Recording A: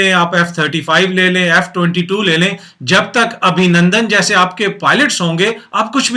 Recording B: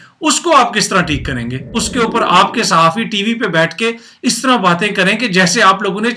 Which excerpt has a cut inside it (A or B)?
B